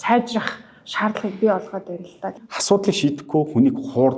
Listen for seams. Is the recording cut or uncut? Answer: cut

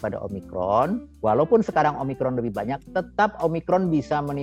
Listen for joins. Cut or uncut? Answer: cut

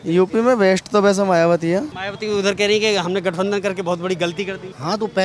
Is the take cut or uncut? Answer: cut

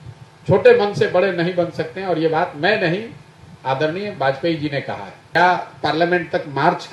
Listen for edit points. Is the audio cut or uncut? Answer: cut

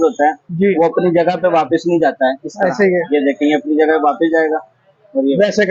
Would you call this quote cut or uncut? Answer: uncut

